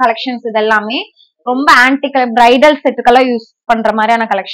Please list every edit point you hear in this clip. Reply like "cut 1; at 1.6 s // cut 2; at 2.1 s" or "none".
none